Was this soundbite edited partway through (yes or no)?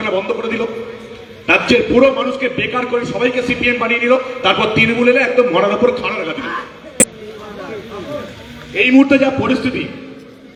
no